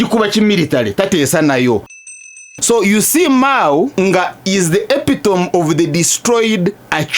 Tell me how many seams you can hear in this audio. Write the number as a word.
two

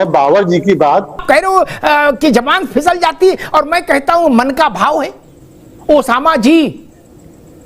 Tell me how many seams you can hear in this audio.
one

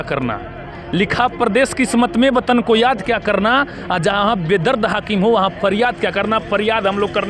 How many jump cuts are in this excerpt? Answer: zero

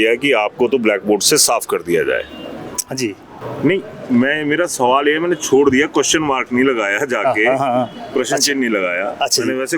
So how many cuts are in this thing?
zero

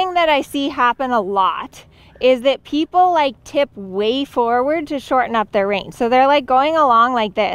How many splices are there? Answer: zero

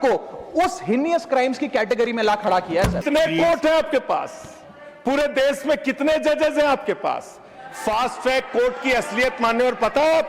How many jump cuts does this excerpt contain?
one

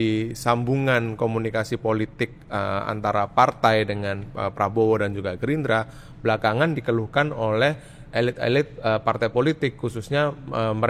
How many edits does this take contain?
zero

